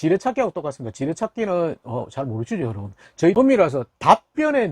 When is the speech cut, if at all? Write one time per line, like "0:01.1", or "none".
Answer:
0:03.3